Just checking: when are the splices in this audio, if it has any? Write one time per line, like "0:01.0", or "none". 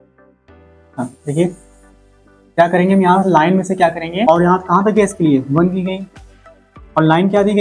0:04.2